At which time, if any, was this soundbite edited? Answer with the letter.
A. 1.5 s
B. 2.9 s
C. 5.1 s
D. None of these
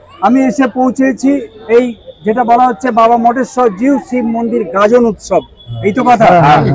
A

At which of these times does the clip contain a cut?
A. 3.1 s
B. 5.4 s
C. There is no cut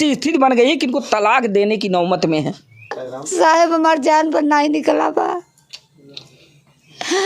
A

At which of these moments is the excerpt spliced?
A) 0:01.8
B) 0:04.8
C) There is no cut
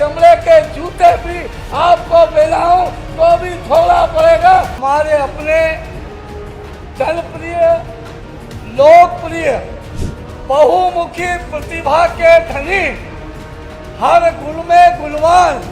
B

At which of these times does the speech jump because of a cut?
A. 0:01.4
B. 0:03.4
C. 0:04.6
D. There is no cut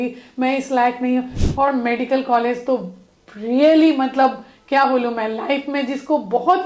A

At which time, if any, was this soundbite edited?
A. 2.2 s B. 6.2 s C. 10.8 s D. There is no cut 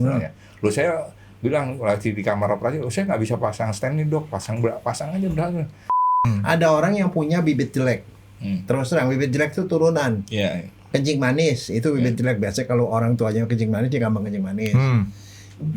B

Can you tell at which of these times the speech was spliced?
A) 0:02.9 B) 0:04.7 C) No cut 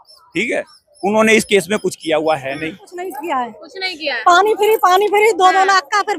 A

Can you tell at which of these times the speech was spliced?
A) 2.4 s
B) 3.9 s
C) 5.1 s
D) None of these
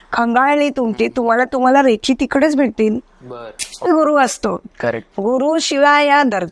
B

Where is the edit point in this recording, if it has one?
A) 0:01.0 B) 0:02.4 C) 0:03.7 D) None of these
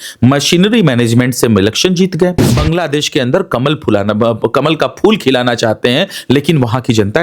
B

